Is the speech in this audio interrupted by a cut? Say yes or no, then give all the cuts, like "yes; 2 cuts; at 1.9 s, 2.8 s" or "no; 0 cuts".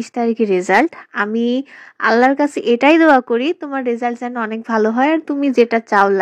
no; 0 cuts